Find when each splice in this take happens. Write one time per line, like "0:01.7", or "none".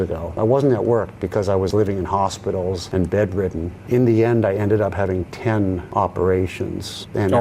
0:01.7
0:05.8